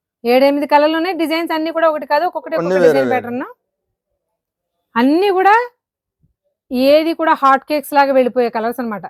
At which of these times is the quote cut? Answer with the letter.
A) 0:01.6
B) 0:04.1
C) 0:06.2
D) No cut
D